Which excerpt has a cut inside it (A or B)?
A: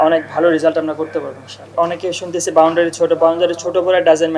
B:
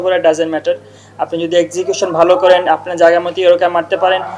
A